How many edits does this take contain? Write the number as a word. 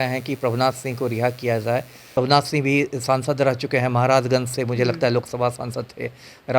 one